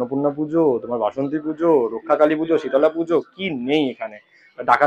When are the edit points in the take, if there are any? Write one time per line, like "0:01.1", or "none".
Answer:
none